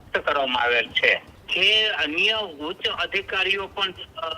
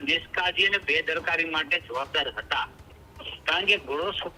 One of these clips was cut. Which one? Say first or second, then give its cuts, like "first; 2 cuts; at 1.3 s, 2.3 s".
first; 1 cut; at 1.4 s